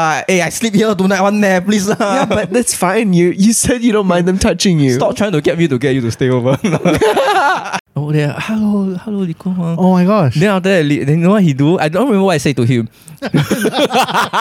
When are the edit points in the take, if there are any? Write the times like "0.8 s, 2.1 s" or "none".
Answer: 7.7 s